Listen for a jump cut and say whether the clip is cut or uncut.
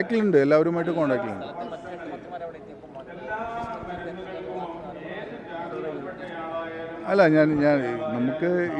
uncut